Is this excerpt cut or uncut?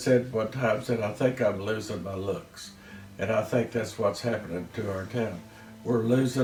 uncut